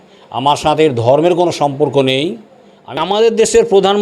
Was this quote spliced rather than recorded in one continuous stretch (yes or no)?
yes